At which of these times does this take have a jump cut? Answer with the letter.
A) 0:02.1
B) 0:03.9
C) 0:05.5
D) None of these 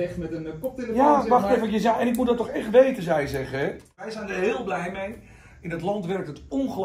B